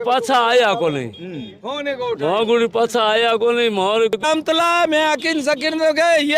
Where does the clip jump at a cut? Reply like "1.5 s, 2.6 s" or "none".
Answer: 4.1 s